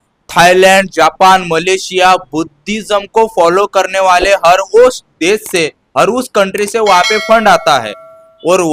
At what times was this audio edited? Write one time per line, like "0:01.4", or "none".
none